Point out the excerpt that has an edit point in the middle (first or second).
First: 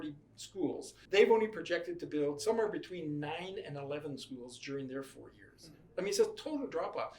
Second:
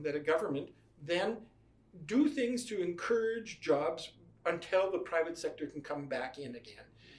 first